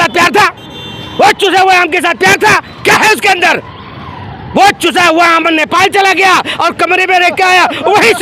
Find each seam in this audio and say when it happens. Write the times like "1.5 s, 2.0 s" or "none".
none